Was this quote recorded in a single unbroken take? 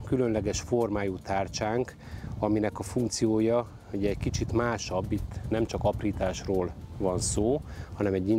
yes; 0 cuts

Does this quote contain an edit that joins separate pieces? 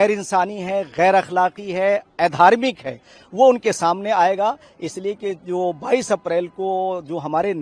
no; 0 cuts

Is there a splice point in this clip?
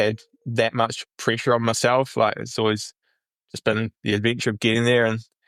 no; 0 cuts

